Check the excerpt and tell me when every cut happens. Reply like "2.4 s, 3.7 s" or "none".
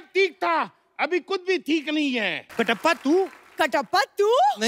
2.4 s